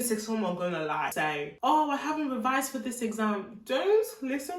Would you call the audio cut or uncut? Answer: cut